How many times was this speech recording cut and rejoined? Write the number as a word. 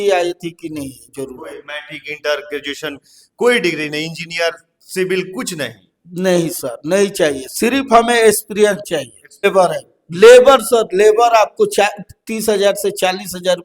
one